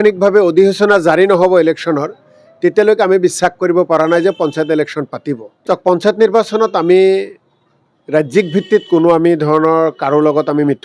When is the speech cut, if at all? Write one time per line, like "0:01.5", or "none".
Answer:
0:05.6